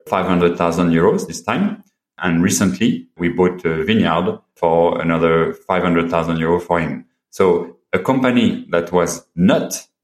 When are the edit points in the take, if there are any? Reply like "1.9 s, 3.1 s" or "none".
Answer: none

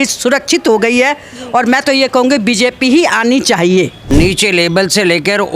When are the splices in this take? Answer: 4.0 s

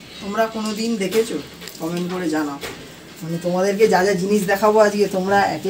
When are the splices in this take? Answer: none

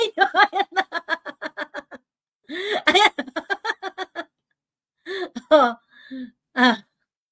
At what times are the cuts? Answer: none

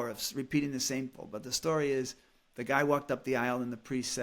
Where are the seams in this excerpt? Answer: 1.1 s

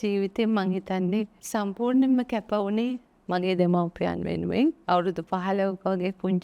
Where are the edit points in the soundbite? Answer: 1.4 s, 4.8 s

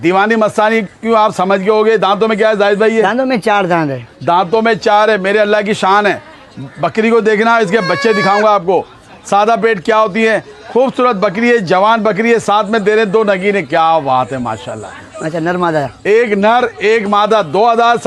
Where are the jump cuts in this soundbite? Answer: none

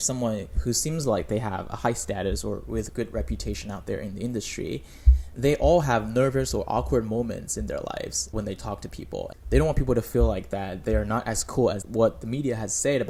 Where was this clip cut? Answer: none

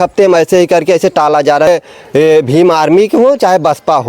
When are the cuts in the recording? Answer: 1.7 s

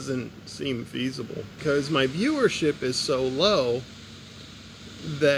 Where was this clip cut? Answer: none

